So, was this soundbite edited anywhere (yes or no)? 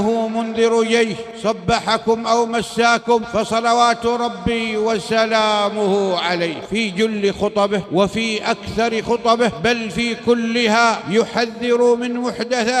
yes